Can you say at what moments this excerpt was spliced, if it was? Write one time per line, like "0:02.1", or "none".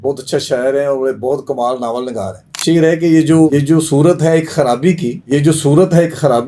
0:02.6
0:03.5
0:05.1